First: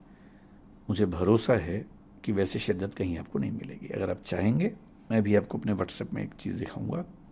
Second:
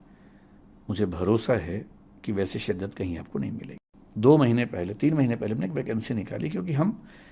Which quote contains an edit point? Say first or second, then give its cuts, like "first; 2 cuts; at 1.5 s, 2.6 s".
second; 1 cut; at 3.8 s